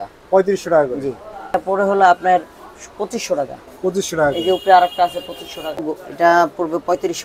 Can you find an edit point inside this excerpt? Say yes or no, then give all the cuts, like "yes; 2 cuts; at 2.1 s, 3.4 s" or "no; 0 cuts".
yes; 2 cuts; at 1.5 s, 5.9 s